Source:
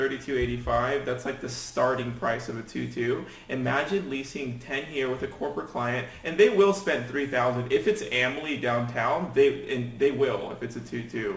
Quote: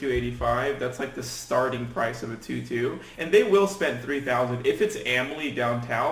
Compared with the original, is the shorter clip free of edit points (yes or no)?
no